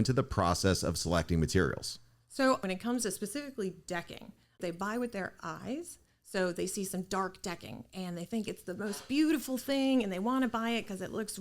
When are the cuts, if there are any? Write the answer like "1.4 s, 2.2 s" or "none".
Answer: 2.6 s, 4.6 s